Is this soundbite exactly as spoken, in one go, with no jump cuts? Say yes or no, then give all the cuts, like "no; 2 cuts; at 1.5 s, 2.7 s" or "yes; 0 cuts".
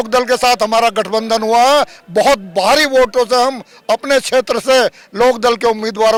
yes; 0 cuts